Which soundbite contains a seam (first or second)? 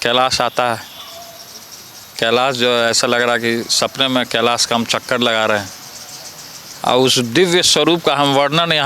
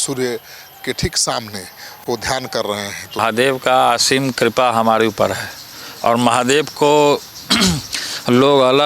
second